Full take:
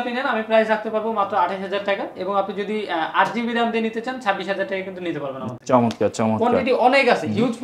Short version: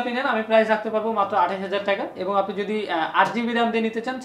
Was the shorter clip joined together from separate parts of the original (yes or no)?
no